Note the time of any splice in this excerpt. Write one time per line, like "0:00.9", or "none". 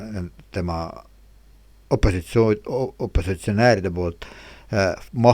none